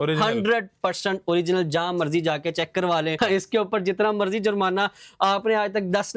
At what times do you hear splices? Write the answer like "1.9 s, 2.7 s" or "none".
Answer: 3.2 s